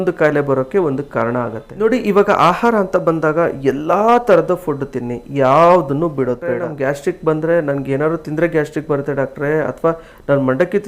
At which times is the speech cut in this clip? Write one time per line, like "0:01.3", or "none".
0:01.6
0:06.7